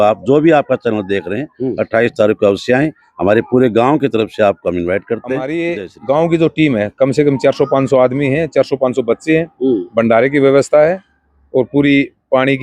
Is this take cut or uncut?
cut